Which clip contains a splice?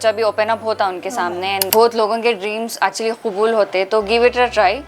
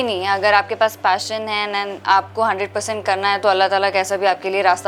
first; 1 cut; at 1.6 s

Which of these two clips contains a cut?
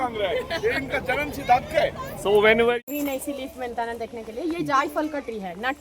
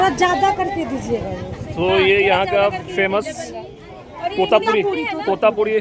first; 1 cut; at 2.8 s

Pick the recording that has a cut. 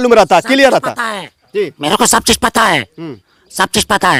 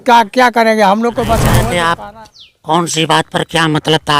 second; 1 cut; at 1.6 s

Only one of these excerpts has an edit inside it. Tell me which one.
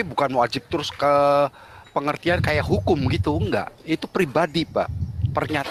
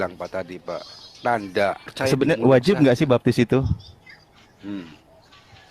second; 1 cut; at 1.9 s

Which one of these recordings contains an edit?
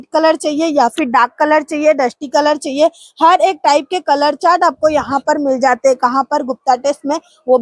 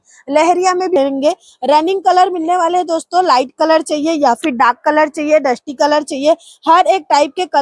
second; 1 cut; at 1.0 s

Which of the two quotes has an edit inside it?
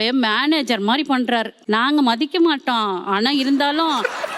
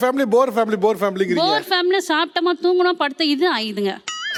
first; 1 cut; at 1.5 s

